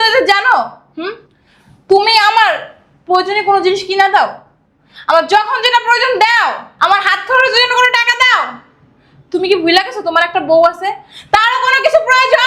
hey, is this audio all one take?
yes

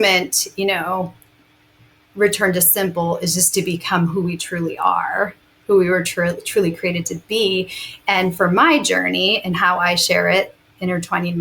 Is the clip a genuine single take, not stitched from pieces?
yes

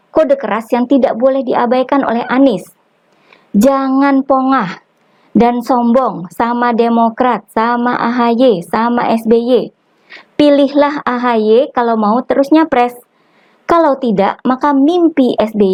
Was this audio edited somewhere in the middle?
no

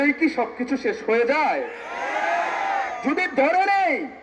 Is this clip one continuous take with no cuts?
yes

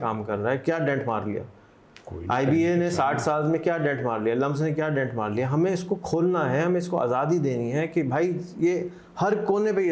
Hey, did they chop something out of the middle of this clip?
no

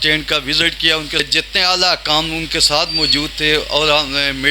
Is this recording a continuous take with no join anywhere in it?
no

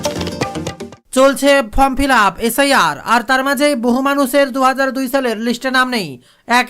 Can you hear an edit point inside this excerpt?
yes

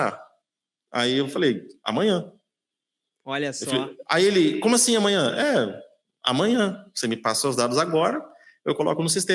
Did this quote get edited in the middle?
no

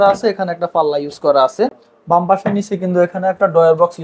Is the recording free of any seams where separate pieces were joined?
yes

